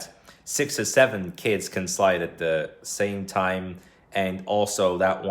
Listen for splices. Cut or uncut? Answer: uncut